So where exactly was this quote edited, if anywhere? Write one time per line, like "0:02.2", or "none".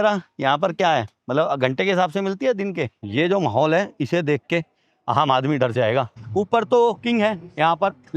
0:01.2
0:03.0
0:06.2